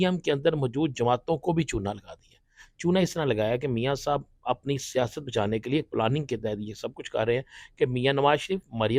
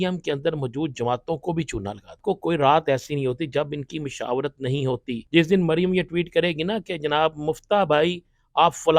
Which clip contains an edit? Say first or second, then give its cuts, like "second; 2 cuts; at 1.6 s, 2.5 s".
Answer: second; 2 cuts; at 2.2 s, 5.2 s